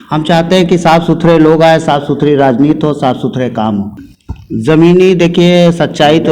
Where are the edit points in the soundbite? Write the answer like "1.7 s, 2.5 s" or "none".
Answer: 4.0 s